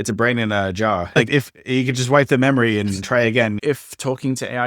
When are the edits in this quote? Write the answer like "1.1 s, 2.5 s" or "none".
1.2 s, 3.6 s